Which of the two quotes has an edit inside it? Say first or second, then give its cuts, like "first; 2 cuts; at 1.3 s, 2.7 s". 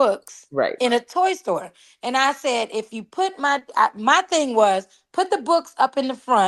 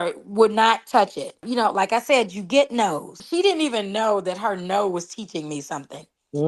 second; 2 cuts; at 1.4 s, 3.2 s